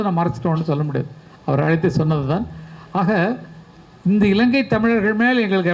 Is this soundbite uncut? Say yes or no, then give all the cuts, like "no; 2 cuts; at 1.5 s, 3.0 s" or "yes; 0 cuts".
yes; 0 cuts